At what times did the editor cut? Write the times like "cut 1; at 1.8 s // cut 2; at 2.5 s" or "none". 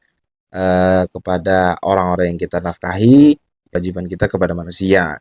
cut 1; at 3.8 s